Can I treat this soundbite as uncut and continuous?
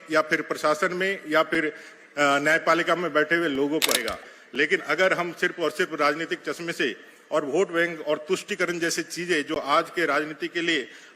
no; 1 cut; at 4.1 s

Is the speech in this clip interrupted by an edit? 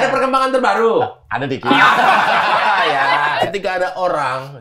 yes; 1 cut; at 3.4 s

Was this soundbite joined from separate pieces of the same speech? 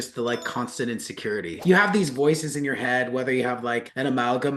no; 0 cuts

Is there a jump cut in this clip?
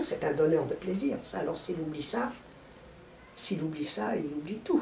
no; 0 cuts

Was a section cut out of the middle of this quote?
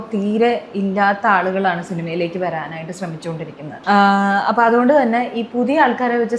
yes; 1 cut; at 3.7 s

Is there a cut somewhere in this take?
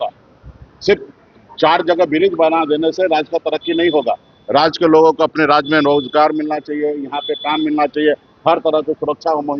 no; 0 cuts

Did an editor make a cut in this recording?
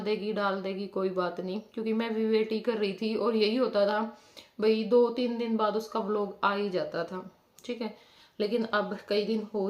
no; 0 cuts

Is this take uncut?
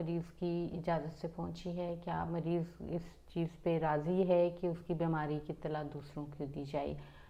yes; 0 cuts

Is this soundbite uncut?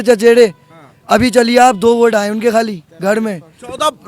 yes; 0 cuts

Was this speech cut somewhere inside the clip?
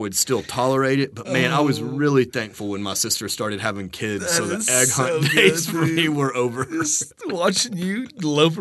no; 0 cuts

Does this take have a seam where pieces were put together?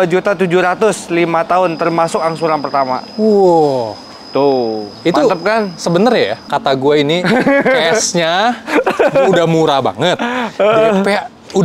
yes; 1 cut; at 6.5 s

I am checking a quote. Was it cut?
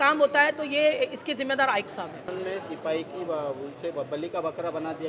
no; 0 cuts

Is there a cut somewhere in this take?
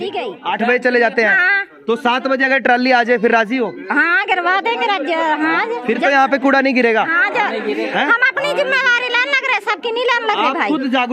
no; 0 cuts

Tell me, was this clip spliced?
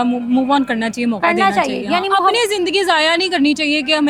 no; 0 cuts

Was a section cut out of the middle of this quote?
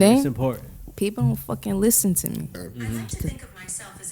no; 0 cuts

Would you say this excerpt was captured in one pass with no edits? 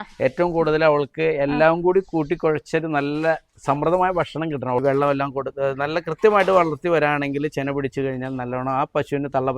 no; 1 cut; at 4.8 s

